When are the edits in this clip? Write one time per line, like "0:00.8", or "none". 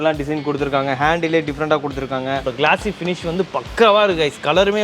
0:02.4